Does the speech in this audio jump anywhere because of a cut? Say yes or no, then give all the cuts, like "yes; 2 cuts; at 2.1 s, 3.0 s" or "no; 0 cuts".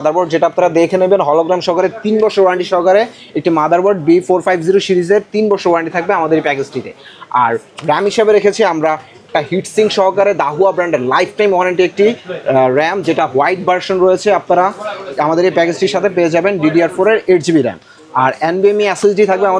no; 0 cuts